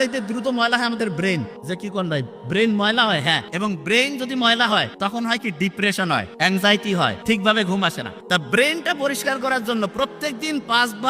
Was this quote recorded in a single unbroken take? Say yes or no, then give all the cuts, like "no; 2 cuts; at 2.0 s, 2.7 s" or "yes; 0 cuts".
no; 6 cuts; at 1.5 s, 3.5 s, 4.9 s, 6.3 s, 7.2 s, 8.1 s